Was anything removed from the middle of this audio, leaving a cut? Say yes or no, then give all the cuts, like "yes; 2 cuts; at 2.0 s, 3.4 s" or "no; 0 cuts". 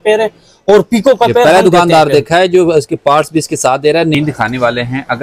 yes; 1 cut; at 4.1 s